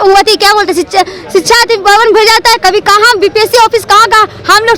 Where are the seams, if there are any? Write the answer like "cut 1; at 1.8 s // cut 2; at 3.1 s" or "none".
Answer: none